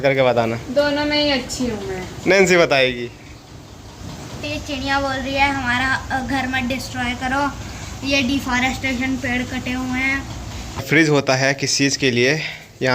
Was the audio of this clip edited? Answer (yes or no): yes